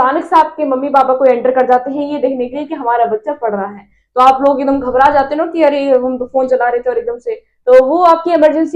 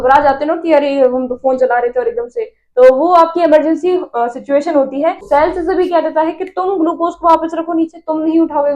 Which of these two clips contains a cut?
second; 1 cut; at 5.2 s

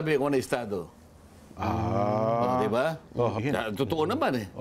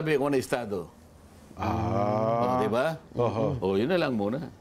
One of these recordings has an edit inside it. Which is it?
first; 1 cut; at 3.4 s

